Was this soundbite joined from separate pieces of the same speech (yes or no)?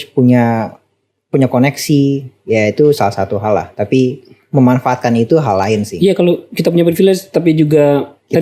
no